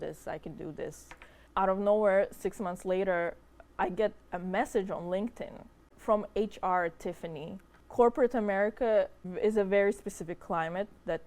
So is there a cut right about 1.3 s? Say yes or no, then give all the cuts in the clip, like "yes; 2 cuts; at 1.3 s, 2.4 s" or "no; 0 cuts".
yes; 4 cuts; at 1.3 s, 5.9 s, 7.8 s, 9.2 s